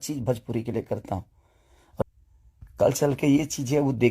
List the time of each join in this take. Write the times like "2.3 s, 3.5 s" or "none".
2.0 s